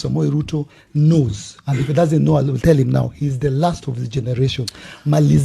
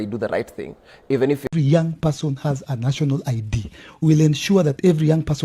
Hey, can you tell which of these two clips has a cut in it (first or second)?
second